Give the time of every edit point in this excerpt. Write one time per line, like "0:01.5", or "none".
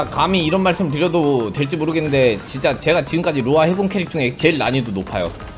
none